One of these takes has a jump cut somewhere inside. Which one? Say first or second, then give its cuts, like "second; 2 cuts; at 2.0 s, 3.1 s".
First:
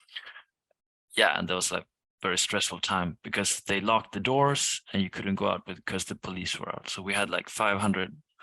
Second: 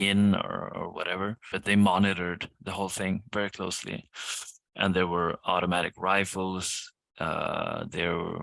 second; 1 cut; at 1.5 s